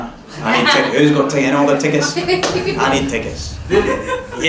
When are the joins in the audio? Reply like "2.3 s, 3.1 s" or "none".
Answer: none

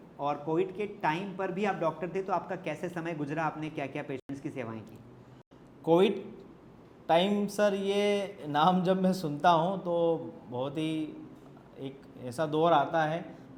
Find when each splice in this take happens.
none

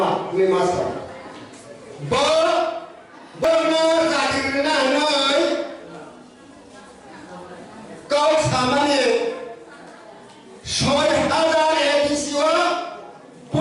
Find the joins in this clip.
3.4 s

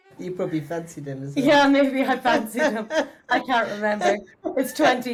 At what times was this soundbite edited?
none

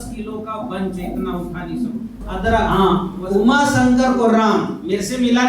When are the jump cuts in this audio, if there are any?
2.7 s

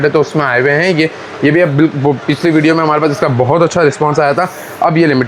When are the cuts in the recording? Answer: none

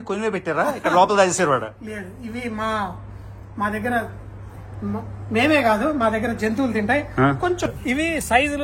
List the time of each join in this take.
7.7 s

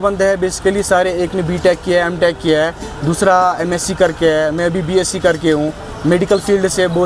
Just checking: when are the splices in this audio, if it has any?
none

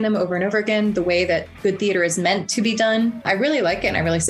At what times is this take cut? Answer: 1.5 s, 3.2 s

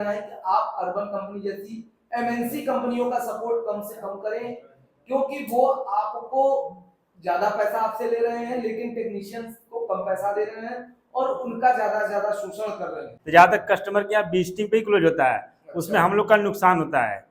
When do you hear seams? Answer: 13.1 s

